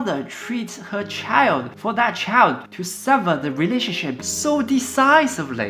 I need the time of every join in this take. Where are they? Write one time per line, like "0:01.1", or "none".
none